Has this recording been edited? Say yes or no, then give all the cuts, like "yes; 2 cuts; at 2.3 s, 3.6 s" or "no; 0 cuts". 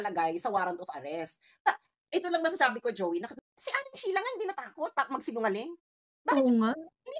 yes; 1 cut; at 3.3 s